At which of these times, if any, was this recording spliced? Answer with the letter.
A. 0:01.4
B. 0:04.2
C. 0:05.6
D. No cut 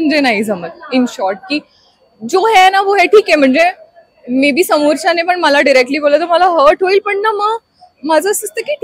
D